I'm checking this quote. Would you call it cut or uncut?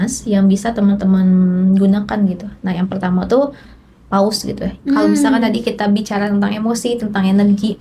cut